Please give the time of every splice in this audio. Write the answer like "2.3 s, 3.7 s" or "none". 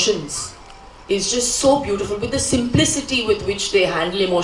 none